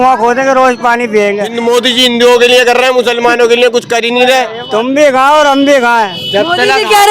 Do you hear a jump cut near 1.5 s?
yes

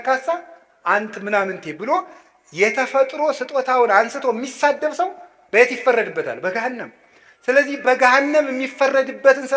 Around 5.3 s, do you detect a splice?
no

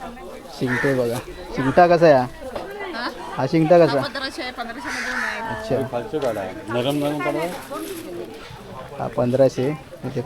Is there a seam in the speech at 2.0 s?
no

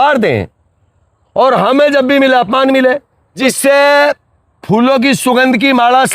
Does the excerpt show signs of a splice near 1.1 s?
no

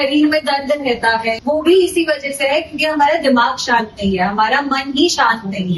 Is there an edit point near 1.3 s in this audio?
yes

